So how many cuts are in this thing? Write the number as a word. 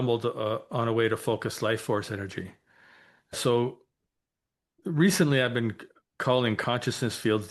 one